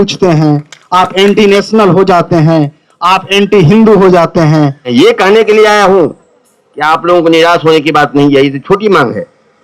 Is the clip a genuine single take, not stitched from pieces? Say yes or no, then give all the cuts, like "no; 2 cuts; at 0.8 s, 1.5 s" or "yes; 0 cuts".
no; 1 cut; at 4.9 s